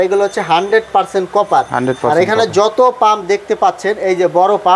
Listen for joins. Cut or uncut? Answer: uncut